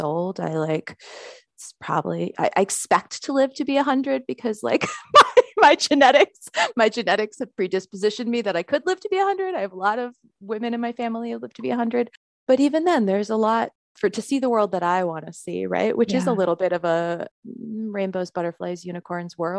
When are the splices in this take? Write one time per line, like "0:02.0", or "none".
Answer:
0:12.3
0:13.8
0:17.3